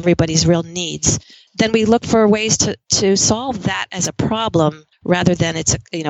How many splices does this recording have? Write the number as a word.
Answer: two